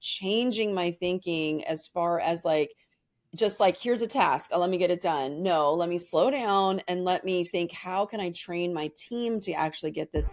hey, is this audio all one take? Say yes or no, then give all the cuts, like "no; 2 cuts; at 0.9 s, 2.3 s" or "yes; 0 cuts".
yes; 0 cuts